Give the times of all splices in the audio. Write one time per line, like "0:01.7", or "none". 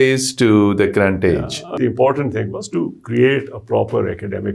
0:01.7